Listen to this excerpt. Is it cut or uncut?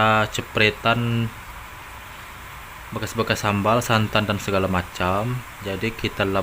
uncut